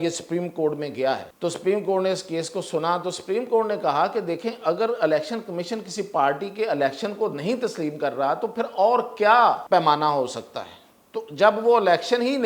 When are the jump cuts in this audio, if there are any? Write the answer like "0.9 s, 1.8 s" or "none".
1.3 s, 9.6 s